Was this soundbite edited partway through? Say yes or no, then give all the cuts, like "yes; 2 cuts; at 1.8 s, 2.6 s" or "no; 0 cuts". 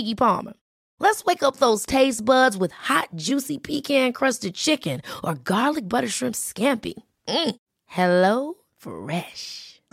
no; 0 cuts